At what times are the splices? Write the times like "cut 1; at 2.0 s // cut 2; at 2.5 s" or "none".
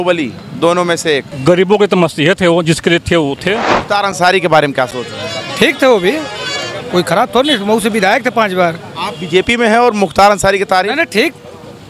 cut 1; at 1.3 s // cut 2; at 3.7 s